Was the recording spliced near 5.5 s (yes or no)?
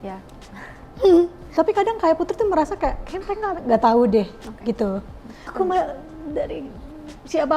yes